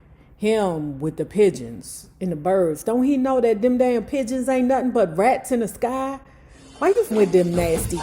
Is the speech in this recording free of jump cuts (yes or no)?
no